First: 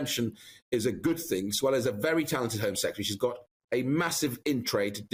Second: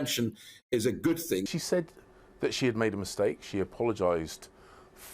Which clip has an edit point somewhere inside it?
second; 1 cut; at 1.5 s

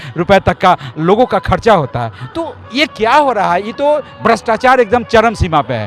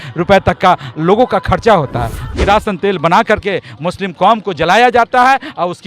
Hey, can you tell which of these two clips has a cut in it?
second; 1 cut; at 2.3 s

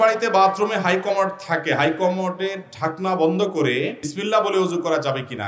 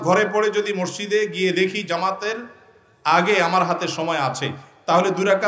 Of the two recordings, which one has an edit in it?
first; 1 cut; at 4.0 s

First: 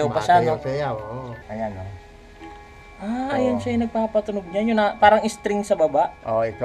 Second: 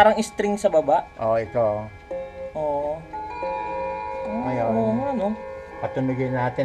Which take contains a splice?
first; 1 cut; at 1.4 s

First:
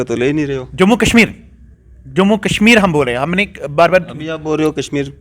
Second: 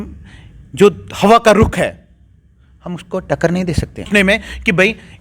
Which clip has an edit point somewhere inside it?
second; 1 cut; at 4.1 s

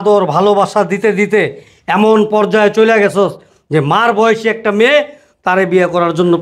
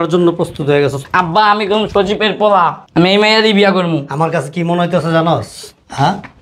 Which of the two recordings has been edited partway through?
second; 1 cut; at 2.8 s

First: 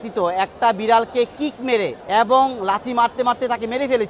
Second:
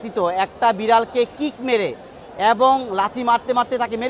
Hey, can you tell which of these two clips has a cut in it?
first; 1 cut; at 2.0 s

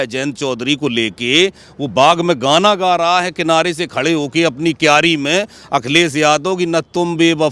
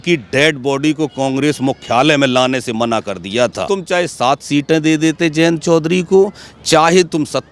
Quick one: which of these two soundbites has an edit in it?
second; 1 cut; at 3.6 s

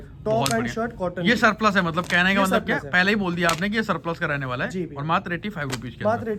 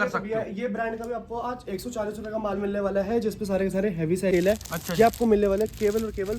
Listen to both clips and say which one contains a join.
second; 1 cut; at 4.3 s

